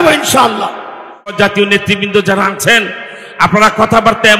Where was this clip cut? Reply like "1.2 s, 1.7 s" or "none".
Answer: 1.4 s